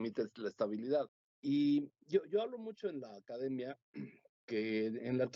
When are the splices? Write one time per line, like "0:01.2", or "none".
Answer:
0:01.2